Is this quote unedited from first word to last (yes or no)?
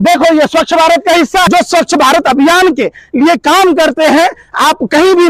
no